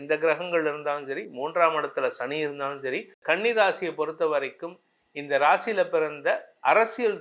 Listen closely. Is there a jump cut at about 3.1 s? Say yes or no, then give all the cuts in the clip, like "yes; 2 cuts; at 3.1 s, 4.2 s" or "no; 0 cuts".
yes; 1 cut; at 3.1 s